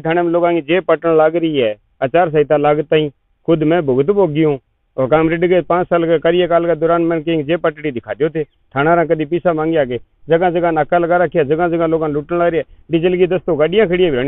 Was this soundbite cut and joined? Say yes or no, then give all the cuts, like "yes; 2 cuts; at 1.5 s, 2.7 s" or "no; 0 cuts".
no; 0 cuts